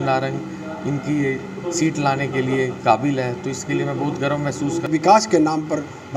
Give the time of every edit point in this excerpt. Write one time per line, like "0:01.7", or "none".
0:04.9